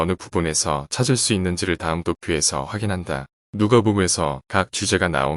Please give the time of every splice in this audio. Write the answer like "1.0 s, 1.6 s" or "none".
none